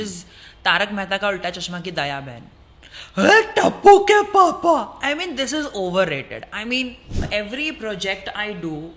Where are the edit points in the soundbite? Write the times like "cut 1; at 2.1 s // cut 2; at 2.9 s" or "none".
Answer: cut 1; at 7.3 s